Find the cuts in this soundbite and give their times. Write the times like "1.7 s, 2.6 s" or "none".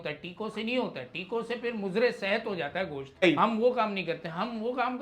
3.2 s